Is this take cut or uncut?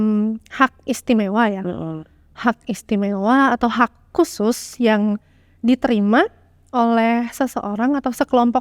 uncut